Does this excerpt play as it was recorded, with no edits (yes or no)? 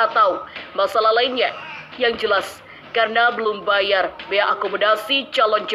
no